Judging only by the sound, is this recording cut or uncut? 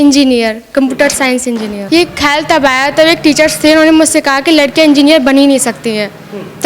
cut